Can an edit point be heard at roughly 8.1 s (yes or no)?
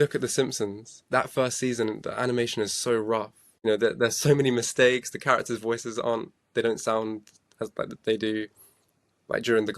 no